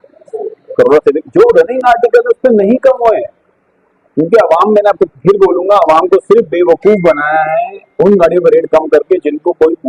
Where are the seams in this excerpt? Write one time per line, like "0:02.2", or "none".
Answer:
none